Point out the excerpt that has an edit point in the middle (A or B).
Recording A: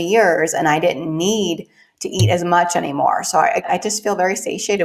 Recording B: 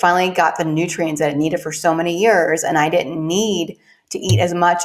A